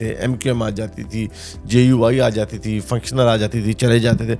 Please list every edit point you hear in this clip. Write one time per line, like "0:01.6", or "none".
none

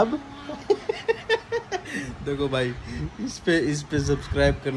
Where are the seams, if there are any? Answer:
none

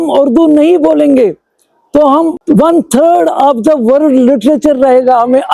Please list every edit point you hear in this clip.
0:02.4

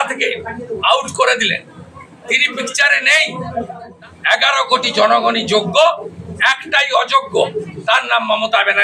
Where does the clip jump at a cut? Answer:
0:03.8

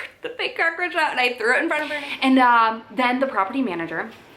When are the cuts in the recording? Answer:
0:01.9

